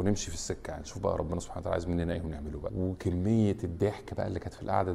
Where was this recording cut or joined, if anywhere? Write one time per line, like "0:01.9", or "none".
0:02.7